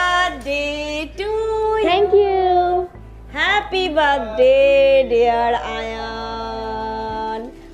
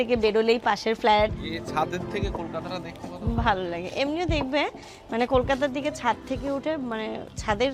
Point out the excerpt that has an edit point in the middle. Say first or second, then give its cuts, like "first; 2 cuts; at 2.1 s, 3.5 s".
second; 1 cut; at 1.5 s